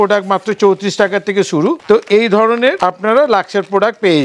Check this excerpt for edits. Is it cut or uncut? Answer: cut